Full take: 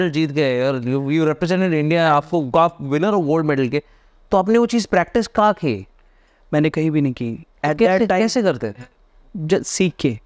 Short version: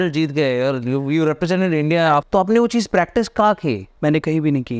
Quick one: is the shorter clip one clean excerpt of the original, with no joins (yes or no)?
no